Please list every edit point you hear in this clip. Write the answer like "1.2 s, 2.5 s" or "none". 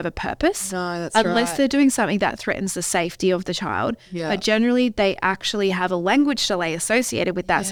none